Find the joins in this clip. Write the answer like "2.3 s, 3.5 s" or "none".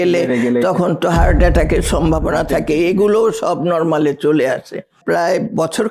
5.0 s